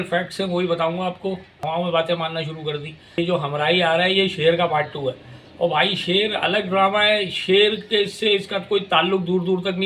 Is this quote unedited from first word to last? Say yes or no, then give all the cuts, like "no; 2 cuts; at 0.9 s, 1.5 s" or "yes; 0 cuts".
no; 2 cuts; at 1.5 s, 3.1 s